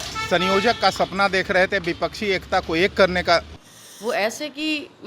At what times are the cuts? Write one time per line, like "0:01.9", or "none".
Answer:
0:03.6